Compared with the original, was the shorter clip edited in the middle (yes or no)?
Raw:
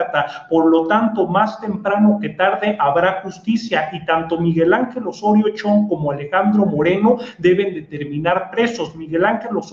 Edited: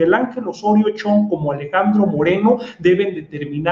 no